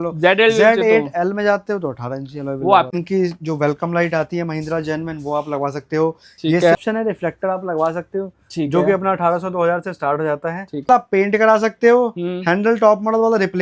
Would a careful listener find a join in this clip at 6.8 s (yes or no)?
yes